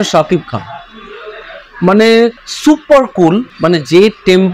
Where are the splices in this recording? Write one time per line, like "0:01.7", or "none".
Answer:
0:02.5
0:03.5